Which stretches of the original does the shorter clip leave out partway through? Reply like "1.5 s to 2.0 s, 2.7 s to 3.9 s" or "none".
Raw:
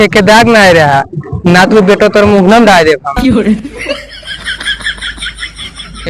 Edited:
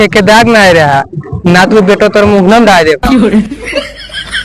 3.0 s to 3.2 s